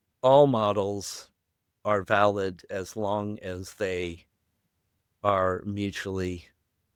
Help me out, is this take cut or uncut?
uncut